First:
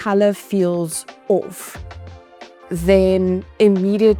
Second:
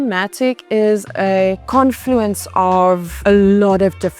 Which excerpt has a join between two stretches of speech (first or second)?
second